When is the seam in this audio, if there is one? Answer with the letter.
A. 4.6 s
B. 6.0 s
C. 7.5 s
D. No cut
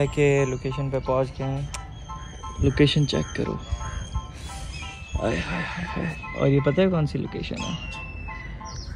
D